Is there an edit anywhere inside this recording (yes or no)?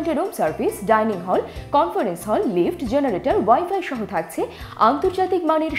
no